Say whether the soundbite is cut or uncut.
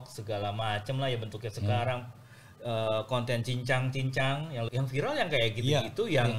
cut